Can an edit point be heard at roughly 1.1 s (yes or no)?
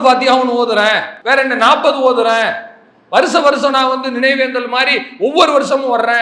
yes